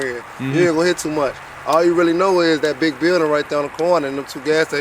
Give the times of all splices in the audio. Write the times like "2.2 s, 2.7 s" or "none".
none